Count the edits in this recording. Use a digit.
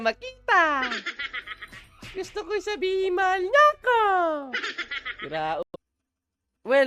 1